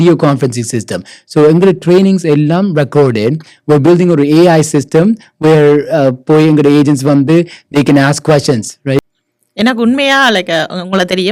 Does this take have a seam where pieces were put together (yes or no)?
yes